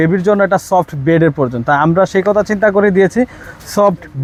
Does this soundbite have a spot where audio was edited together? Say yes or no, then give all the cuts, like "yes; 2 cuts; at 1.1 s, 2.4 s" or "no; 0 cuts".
no; 0 cuts